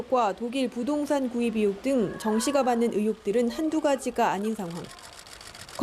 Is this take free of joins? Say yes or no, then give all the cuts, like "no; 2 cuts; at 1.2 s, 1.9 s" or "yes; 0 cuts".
no; 1 cut; at 4.9 s